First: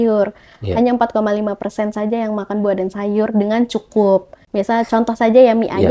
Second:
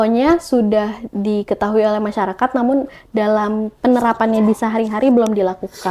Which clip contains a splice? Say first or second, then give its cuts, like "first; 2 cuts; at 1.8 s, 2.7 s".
first; 1 cut; at 4.4 s